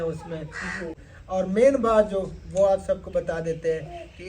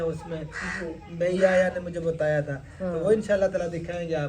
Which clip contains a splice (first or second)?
first